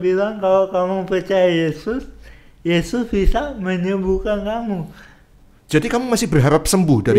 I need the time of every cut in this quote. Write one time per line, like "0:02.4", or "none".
none